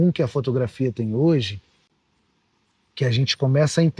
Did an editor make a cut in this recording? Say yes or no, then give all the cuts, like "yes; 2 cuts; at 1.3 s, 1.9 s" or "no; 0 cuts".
no; 0 cuts